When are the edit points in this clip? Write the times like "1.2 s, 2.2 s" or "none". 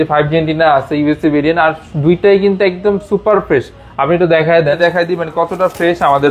4.8 s